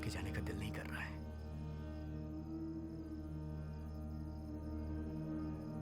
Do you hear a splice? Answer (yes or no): no